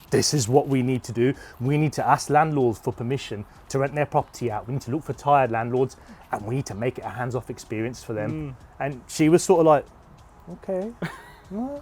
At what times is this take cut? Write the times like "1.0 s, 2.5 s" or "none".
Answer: none